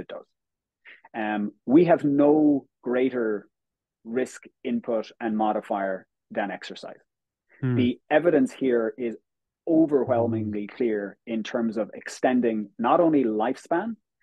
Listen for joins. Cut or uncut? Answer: uncut